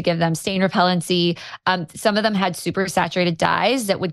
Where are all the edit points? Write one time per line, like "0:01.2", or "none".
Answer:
none